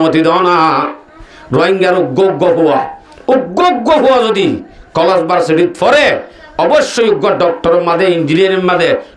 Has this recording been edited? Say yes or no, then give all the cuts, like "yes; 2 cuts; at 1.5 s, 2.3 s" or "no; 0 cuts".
no; 0 cuts